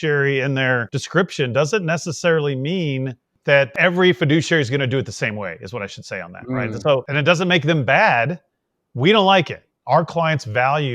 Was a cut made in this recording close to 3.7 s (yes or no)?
yes